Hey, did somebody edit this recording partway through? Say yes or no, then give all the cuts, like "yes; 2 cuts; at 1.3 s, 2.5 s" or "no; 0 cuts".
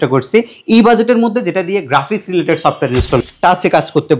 yes; 1 cut; at 3.2 s